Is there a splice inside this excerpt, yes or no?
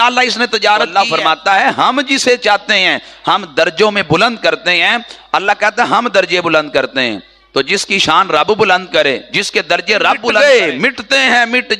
yes